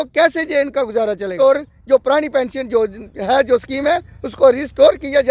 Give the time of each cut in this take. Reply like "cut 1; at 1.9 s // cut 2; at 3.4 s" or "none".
cut 1; at 1.3 s